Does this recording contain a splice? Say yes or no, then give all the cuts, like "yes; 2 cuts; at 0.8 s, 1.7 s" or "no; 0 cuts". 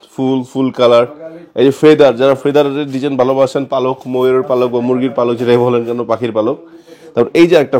no; 0 cuts